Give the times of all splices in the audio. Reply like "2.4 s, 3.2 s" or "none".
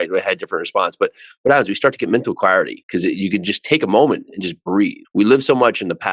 1.4 s